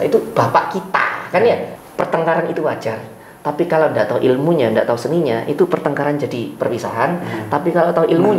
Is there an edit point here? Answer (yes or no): yes